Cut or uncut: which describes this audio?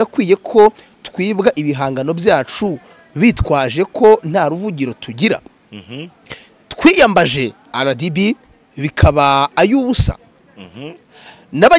uncut